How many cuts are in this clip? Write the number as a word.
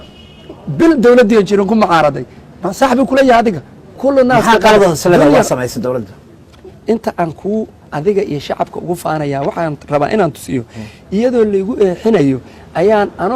one